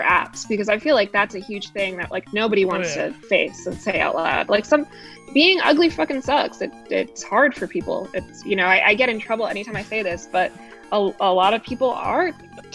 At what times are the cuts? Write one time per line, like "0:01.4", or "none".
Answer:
none